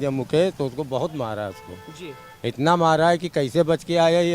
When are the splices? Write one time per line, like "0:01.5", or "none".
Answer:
none